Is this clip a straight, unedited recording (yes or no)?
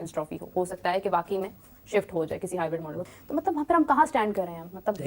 no